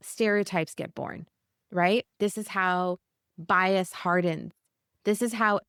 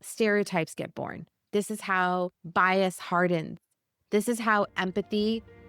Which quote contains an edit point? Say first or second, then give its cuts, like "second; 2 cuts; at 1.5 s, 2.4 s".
second; 2 cuts; at 1.4 s, 2.4 s